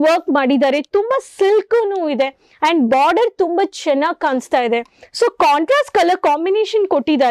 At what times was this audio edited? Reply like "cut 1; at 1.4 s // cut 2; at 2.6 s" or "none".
none